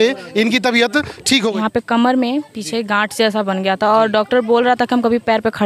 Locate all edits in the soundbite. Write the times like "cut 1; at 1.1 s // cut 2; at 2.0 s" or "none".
cut 1; at 1.5 s